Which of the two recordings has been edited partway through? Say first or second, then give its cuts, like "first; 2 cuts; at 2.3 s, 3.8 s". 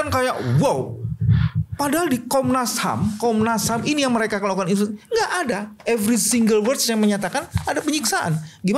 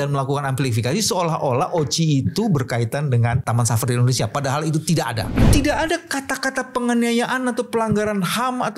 second; 2 cuts; at 3.4 s, 5.5 s